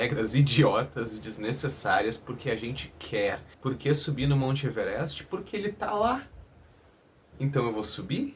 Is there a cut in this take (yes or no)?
yes